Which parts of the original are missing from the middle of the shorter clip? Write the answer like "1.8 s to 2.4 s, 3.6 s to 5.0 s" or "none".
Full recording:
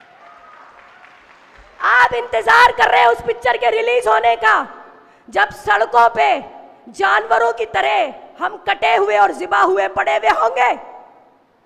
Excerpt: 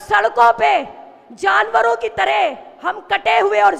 none